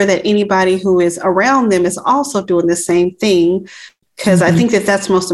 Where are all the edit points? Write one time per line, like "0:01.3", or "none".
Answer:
none